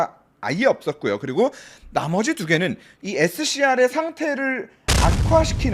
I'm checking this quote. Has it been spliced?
yes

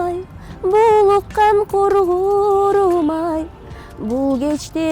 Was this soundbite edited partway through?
no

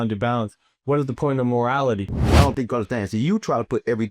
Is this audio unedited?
no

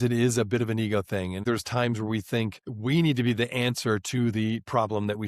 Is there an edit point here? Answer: yes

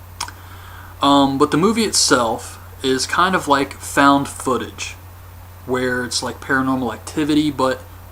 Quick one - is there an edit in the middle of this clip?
no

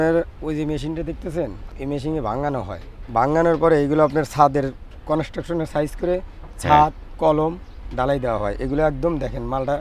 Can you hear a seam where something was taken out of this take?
yes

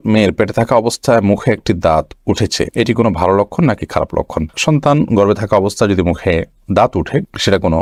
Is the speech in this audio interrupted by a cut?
no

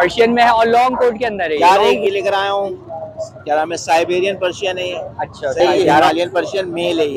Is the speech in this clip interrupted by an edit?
yes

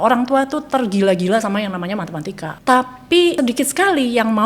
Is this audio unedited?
no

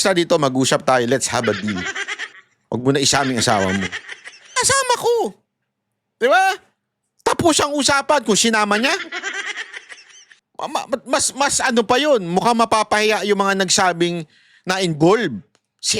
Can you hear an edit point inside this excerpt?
yes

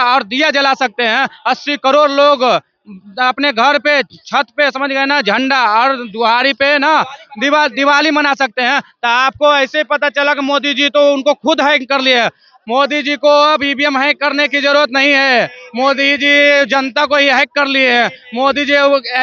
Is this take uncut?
yes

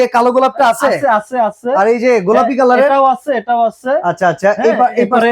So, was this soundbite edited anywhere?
no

